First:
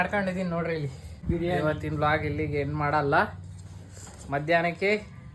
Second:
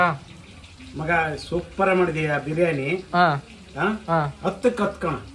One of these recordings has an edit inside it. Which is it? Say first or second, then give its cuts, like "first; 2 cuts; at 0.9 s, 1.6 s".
first; 1 cut; at 1.2 s